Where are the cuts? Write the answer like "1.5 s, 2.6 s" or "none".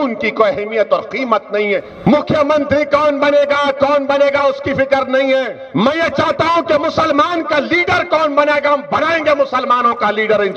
1.9 s, 5.6 s